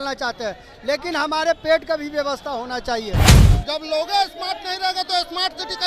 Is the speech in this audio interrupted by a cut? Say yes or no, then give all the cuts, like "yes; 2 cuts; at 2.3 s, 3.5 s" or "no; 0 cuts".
yes; 1 cut; at 3.3 s